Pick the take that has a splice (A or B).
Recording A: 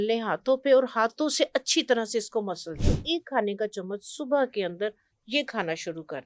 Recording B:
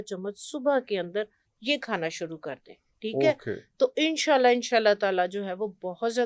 A